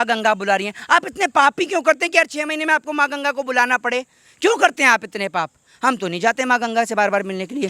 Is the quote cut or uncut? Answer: uncut